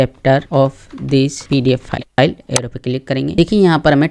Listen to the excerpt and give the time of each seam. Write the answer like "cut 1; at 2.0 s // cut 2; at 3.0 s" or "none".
cut 1; at 2.1 s // cut 2; at 3.4 s